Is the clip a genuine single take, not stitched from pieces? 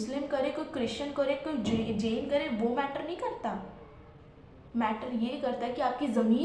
yes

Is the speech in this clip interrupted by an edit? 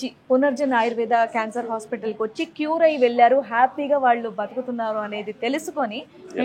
no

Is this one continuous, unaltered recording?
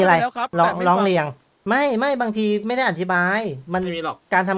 yes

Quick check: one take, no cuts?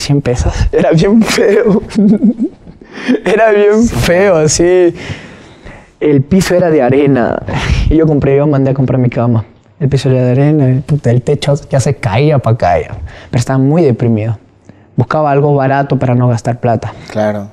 yes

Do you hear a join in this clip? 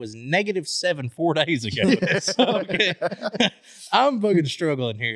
no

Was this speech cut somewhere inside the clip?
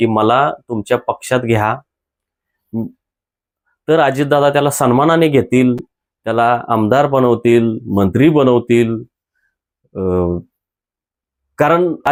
no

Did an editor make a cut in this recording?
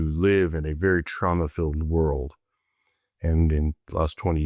no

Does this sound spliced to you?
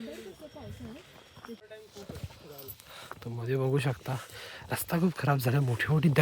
yes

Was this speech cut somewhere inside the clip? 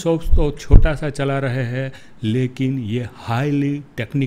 no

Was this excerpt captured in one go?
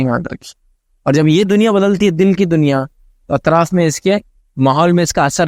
yes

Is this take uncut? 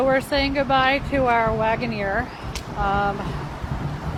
yes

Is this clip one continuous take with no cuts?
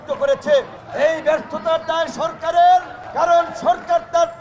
yes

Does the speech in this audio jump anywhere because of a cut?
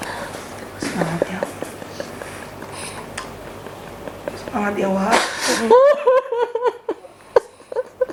no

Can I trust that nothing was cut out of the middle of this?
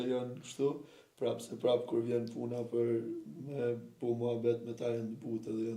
yes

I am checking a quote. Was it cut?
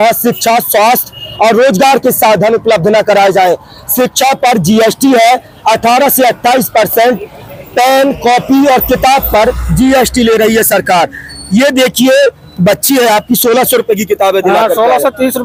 no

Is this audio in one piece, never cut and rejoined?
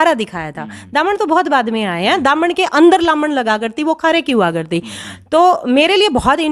yes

